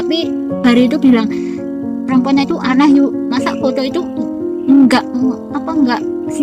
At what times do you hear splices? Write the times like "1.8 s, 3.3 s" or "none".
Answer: none